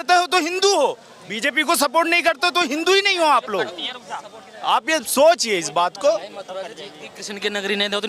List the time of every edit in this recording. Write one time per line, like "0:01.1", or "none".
none